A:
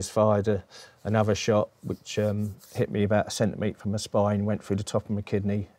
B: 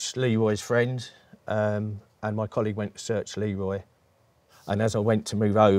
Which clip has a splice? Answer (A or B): B